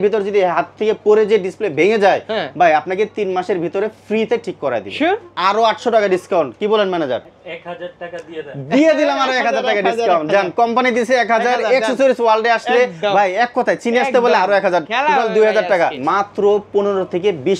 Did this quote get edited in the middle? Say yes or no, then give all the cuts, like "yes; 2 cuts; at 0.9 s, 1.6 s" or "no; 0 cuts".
yes; 3 cuts; at 5.3 s, 7.3 s, 16.0 s